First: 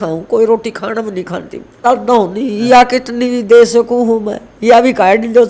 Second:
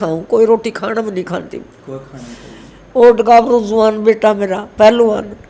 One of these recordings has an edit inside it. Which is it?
first; 1 cut; at 1.8 s

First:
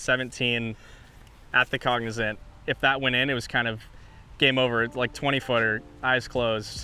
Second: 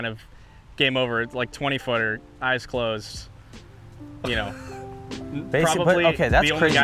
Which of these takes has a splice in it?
first; 1 cut; at 2.4 s

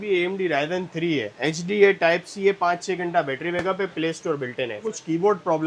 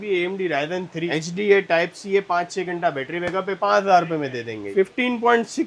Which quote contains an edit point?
second; 3 cuts; at 1.1 s, 3.6 s, 4.7 s

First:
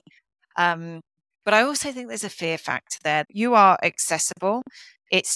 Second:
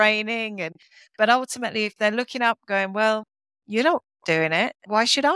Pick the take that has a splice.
first; 1 cut; at 3.3 s

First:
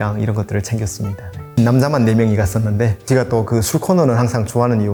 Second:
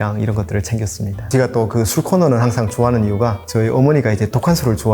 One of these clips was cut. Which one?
second; 2 cuts; at 1.2 s, 3.4 s

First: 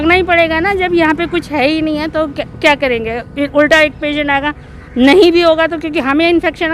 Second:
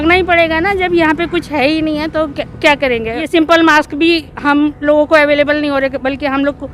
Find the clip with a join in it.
second; 1 cut; at 3.3 s

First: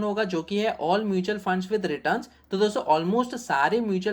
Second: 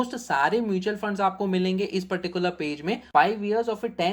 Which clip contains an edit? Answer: second; 1 cut; at 3.0 s

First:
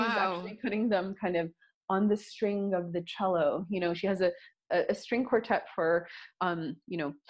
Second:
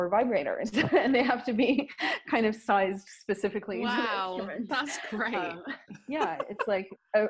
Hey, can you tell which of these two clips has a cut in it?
first; 1 cut; at 4.6 s

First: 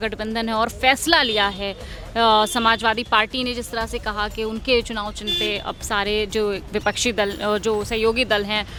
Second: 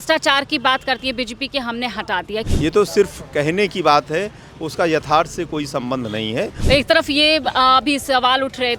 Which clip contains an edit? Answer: second; 2 cuts; at 2.5 s, 6.6 s

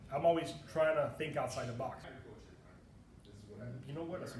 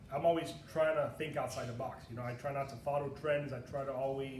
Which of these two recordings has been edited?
first; 1 cut; at 2.1 s

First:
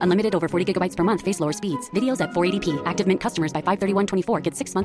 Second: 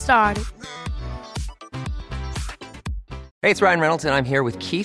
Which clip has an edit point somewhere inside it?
second; 1 cut; at 3.2 s

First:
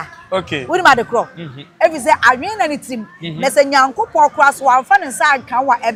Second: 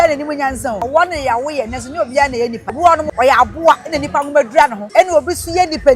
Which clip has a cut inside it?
second; 3 cuts; at 0.8 s, 3.0 s, 4.8 s

